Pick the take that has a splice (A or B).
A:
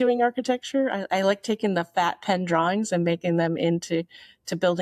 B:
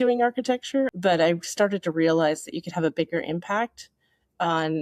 B